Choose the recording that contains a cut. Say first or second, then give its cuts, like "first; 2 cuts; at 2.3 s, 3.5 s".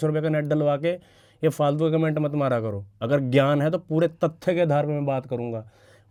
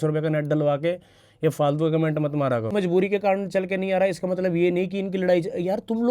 second; 1 cut; at 2.7 s